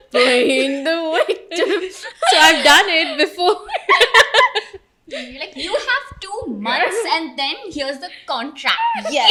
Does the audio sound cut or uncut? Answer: uncut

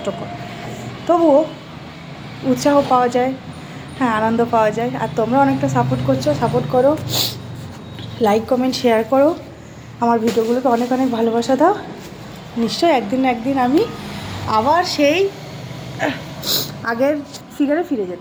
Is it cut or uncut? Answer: uncut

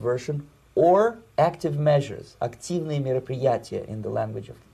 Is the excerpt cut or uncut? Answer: uncut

